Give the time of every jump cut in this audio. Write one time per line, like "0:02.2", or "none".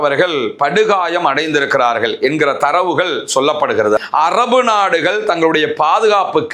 0:04.0